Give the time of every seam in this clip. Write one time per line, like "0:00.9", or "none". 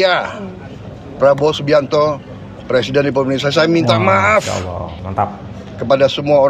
none